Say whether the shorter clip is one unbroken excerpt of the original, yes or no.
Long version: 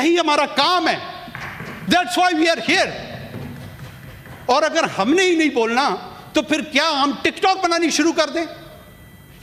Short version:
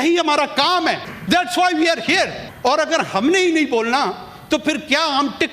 no